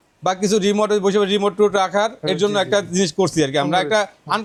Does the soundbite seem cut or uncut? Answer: uncut